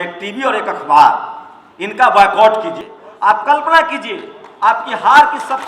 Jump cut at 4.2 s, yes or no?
no